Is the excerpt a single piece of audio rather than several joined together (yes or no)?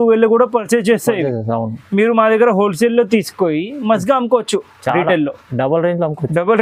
yes